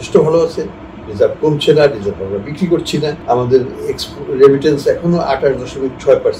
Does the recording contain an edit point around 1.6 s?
no; 1 cut; at 3.2 s

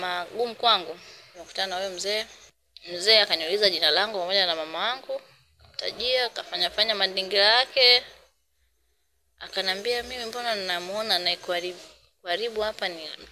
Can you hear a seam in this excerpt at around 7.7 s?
no; 1 cut; at 1.5 s

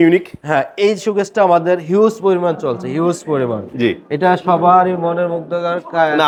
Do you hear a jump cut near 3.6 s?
no; 0 cuts

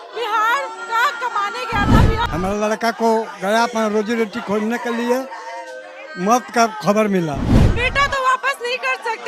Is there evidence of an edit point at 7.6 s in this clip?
yes; 2 cuts; at 2.2 s, 7.6 s

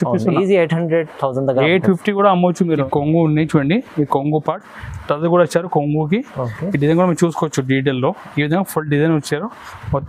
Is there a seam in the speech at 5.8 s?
no; 1 cut; at 2.9 s

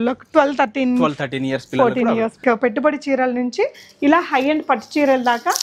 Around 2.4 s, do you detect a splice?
yes; 1 cut; at 2.4 s

